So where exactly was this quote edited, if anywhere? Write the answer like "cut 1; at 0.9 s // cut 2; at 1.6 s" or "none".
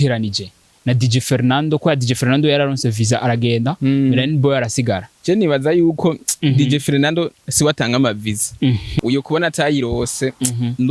cut 1; at 5.1 s // cut 2; at 6.4 s // cut 3; at 8.9 s